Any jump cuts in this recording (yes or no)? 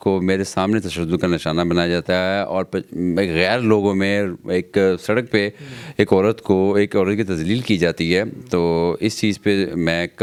no